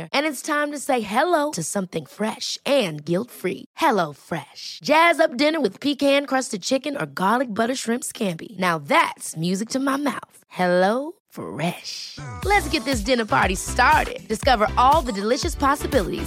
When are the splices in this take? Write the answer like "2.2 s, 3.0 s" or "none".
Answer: none